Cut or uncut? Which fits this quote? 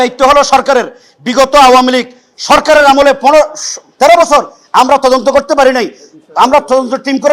uncut